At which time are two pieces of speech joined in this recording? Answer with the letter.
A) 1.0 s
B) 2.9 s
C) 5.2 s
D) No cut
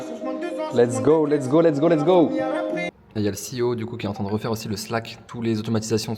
D